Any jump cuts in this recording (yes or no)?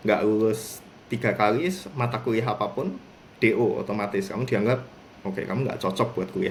no